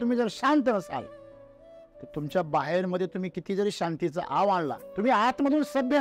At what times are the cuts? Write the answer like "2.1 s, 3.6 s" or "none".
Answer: 4.8 s